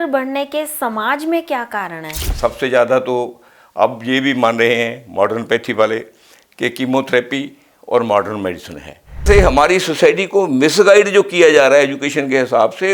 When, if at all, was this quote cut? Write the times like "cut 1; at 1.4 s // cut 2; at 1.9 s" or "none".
cut 1; at 2.3 s // cut 2; at 9.2 s